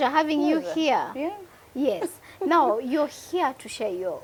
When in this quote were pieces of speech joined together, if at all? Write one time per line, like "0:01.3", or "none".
none